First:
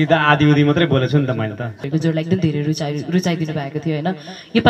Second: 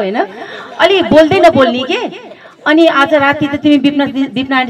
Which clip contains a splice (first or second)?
first